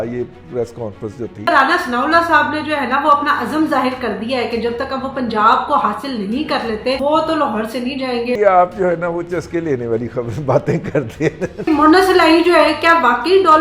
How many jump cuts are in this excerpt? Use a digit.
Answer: 4